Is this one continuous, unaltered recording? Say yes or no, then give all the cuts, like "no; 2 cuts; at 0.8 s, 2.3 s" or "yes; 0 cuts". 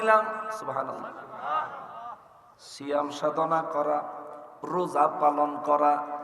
yes; 0 cuts